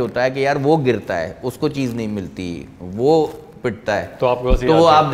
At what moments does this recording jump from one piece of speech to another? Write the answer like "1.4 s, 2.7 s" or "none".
none